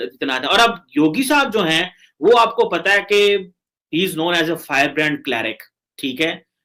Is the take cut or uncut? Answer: uncut